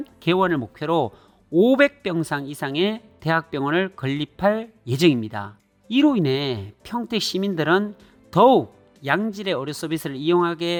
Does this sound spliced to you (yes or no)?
no